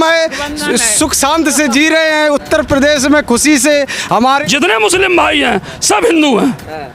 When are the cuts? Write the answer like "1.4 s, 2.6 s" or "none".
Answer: 4.4 s